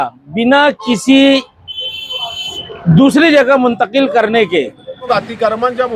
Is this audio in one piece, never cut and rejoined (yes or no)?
no